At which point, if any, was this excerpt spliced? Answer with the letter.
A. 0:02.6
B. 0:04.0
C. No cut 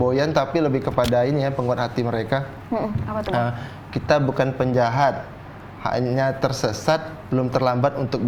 C